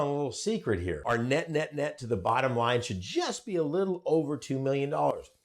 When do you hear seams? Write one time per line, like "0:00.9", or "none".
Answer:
0:01.0

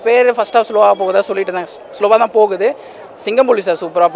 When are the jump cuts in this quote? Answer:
0:02.9

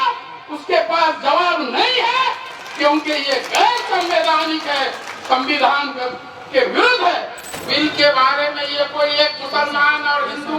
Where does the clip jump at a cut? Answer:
0:07.5

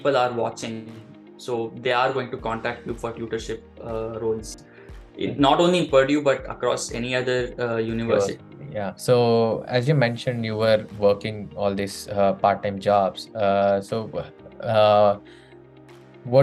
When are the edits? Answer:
none

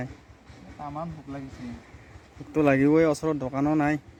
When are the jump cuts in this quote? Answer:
none

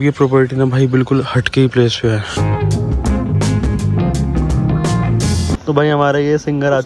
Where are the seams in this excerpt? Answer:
none

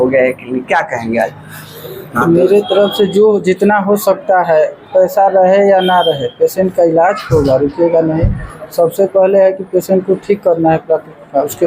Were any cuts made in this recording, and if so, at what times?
0:02.2

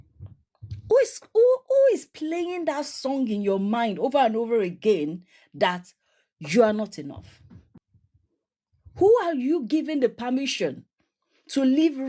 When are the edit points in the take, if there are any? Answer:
0:07.8

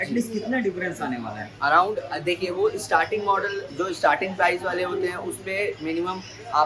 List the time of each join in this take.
none

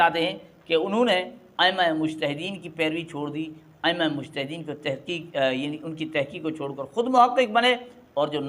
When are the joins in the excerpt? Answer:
none

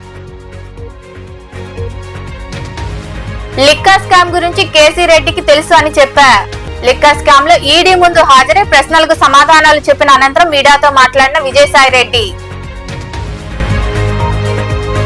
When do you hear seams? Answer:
0:01.0

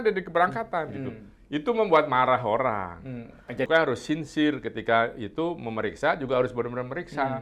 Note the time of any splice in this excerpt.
0:03.7

